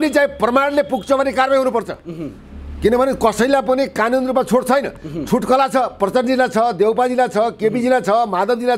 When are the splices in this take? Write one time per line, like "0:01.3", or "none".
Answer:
none